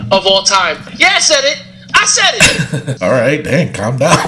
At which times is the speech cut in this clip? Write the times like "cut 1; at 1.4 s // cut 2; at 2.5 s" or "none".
cut 1; at 2.9 s